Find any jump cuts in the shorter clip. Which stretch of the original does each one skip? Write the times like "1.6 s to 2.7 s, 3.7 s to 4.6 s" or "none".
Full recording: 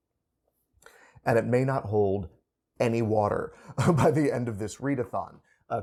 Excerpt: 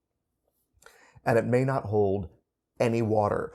none